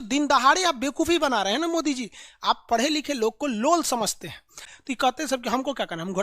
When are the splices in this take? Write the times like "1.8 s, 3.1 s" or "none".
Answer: 4.6 s